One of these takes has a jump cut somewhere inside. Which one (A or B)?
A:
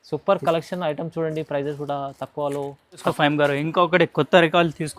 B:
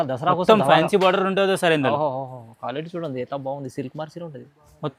A